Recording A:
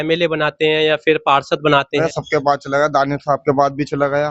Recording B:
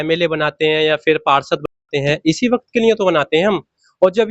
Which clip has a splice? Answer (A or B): A